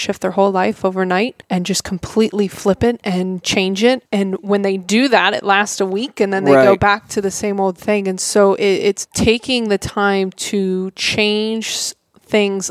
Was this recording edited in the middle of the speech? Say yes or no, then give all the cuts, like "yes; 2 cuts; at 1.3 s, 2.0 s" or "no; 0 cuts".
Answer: yes; 3 cuts; at 1.4 s, 4.0 s, 9.1 s